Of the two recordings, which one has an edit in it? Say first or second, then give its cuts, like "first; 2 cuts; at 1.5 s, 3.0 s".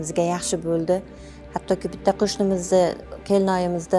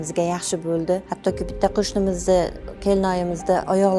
second; 1 cut; at 1.1 s